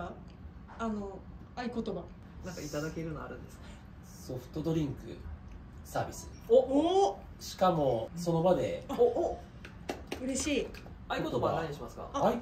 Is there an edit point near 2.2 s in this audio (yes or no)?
yes